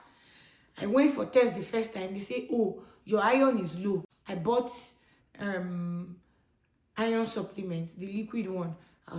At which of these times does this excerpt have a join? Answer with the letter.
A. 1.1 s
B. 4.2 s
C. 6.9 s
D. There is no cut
B